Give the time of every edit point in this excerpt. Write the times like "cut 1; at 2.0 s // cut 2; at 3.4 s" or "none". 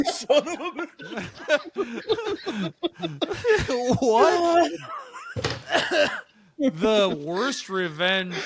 none